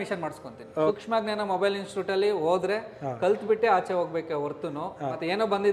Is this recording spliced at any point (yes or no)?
yes